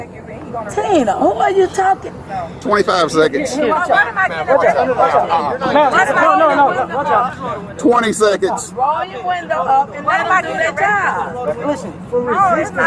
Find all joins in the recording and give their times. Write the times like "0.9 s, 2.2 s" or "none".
none